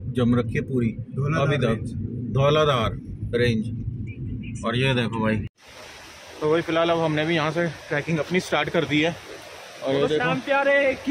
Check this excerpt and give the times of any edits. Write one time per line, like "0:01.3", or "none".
0:05.6